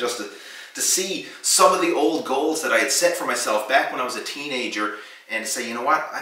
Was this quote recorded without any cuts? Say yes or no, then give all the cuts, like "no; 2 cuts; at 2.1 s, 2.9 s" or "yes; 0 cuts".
yes; 0 cuts